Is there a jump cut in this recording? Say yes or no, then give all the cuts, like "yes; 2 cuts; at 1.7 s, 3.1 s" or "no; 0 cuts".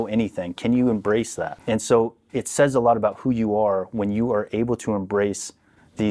yes; 1 cut; at 1.5 s